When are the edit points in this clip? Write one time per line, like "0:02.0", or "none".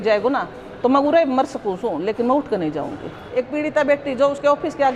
0:03.2